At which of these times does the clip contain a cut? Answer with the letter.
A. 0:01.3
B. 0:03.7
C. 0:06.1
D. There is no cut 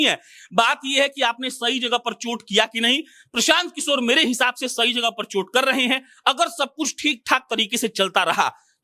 D